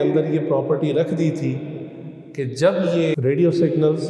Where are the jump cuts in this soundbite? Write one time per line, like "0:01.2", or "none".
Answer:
0:03.2